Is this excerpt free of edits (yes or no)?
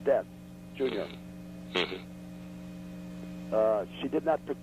no